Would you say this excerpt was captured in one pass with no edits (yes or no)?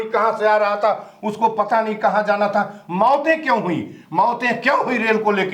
yes